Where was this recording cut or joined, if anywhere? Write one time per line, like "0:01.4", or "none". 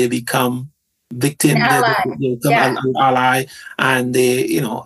none